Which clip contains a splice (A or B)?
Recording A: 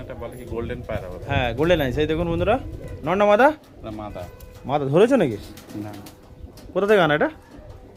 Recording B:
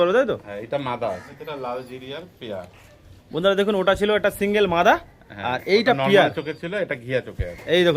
B